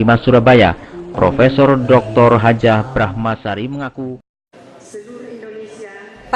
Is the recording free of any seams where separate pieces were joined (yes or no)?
no